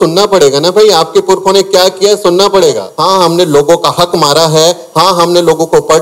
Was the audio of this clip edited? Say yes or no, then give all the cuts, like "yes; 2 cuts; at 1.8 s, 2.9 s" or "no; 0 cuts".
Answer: yes; 1 cut; at 2.9 s